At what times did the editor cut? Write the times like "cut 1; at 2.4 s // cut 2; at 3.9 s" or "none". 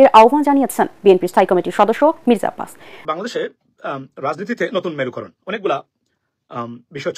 cut 1; at 2.9 s

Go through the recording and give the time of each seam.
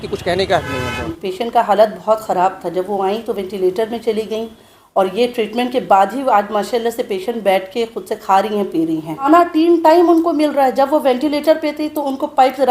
cut 1; at 1.0 s // cut 2; at 9.3 s

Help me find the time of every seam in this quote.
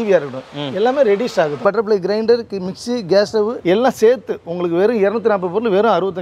cut 1; at 1.6 s // cut 2; at 3.6 s

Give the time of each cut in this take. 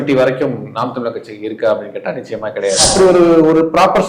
cut 1; at 2.9 s

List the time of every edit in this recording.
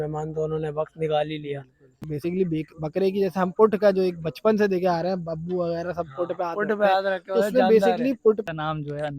cut 1; at 2.1 s // cut 2; at 8.4 s

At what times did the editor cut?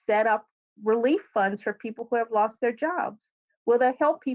none

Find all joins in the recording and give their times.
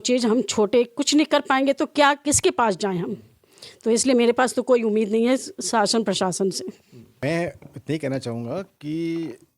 cut 1; at 7.2 s

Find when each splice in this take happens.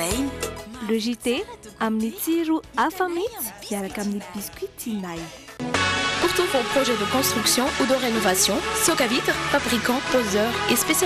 none

